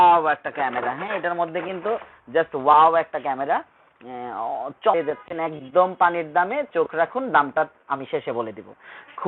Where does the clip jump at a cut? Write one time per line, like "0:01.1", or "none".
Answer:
0:04.9